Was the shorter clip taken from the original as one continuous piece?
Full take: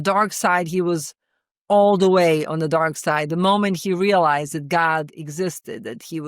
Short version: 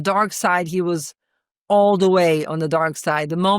yes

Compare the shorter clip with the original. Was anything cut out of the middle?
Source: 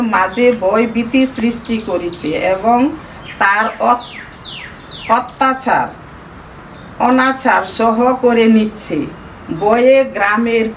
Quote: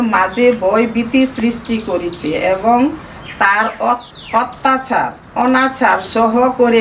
yes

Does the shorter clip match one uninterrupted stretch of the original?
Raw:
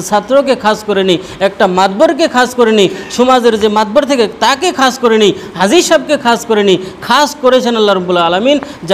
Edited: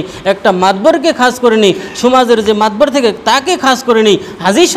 yes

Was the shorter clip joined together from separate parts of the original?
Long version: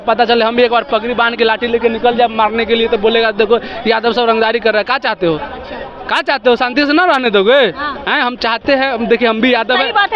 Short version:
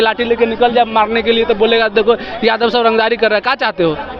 no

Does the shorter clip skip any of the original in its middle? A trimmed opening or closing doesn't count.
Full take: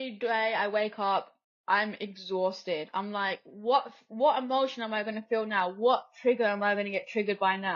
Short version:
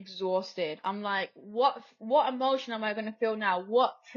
no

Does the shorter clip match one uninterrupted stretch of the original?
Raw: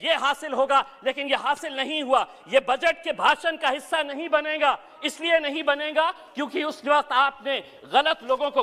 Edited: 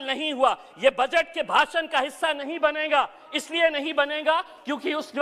yes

